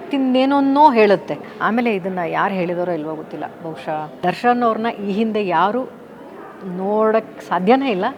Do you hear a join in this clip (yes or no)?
yes